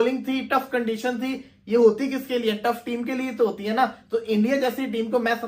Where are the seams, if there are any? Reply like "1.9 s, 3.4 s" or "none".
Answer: none